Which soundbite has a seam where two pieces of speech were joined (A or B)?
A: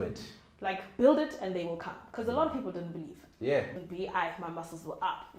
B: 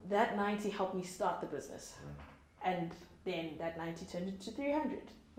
A